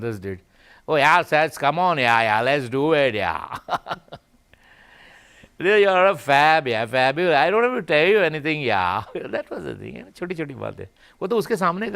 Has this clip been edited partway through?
no; 0 cuts

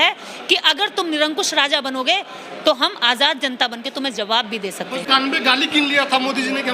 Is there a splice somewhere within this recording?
yes; 1 cut; at 5.0 s

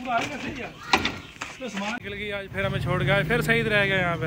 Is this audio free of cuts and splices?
no; 1 cut; at 2.0 s

